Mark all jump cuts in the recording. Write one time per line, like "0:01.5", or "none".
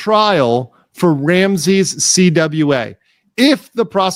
none

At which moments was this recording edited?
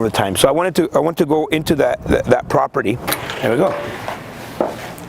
0:03.1

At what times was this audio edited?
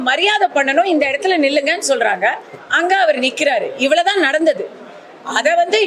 none

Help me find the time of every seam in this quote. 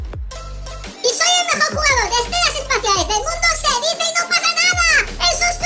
0:00.9

